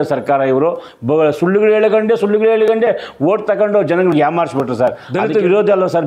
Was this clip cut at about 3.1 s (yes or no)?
no